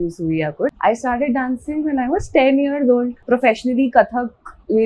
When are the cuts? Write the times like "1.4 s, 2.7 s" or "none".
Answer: 0.8 s, 3.2 s